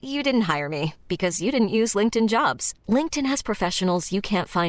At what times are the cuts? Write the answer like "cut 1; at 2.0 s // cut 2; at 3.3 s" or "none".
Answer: none